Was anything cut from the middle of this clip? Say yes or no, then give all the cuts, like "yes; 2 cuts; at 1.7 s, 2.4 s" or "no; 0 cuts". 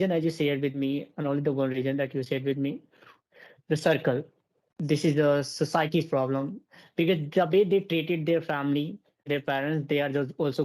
yes; 1 cut; at 9.2 s